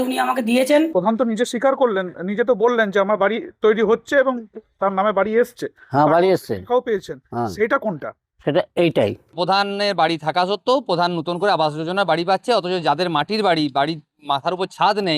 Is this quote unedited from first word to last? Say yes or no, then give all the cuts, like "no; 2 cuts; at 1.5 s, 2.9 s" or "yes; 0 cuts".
no; 2 cuts; at 0.9 s, 9.3 s